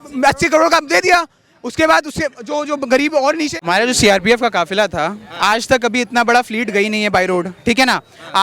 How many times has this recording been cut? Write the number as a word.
one